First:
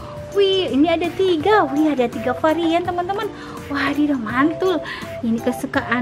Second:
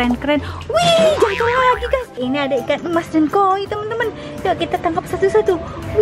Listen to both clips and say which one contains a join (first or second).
second